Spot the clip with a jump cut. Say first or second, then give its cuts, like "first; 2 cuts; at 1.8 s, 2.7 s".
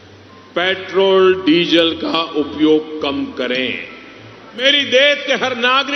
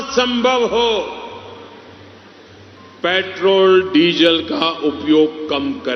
first; 1 cut; at 4.6 s